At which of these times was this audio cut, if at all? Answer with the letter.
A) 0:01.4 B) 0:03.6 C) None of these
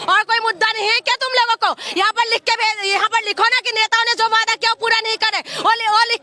C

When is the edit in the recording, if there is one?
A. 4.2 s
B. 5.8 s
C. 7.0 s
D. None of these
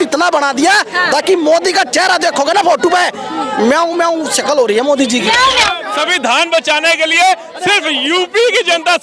B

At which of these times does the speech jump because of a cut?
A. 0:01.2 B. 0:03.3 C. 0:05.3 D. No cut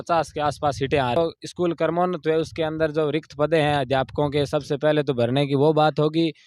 A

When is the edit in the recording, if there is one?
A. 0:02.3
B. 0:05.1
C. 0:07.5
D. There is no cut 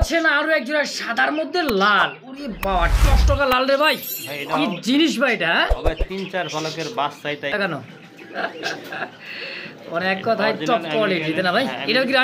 C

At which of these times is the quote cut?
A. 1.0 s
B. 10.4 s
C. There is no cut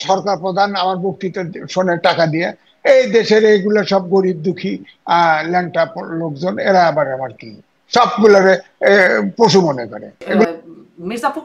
B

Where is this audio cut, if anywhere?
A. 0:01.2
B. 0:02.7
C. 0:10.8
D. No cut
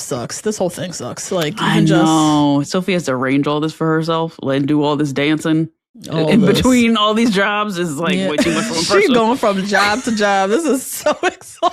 B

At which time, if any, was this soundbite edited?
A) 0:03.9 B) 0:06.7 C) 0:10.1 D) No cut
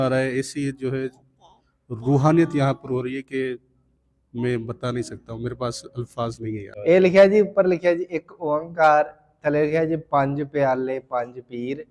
B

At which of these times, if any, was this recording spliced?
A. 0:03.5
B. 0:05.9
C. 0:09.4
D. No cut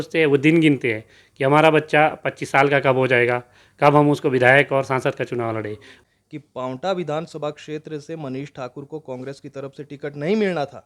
B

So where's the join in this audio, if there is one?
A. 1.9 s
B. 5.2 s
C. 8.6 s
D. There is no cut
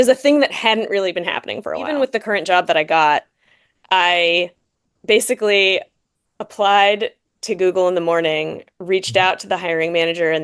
A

